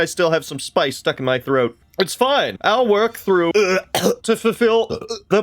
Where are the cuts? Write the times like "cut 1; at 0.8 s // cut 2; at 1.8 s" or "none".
cut 1; at 3.5 s